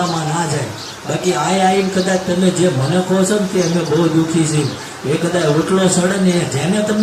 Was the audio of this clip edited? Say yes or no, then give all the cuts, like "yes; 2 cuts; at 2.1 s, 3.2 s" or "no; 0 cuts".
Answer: no; 0 cuts